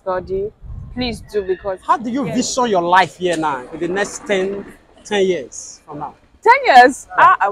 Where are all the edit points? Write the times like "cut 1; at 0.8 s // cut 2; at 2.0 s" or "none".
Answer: cut 1; at 1.8 s